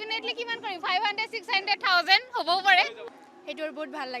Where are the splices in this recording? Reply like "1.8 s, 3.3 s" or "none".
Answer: 3.0 s